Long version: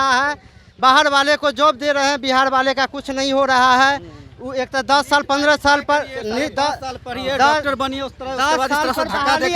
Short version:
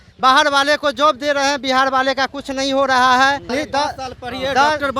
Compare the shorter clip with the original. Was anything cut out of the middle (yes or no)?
yes